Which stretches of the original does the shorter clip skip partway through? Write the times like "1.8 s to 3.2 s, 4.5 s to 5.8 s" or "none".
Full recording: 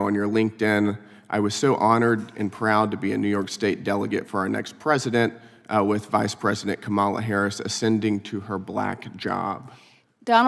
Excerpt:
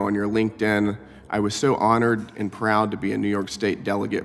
none